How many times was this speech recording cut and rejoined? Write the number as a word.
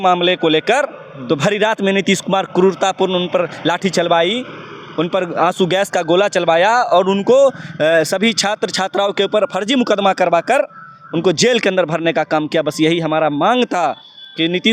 zero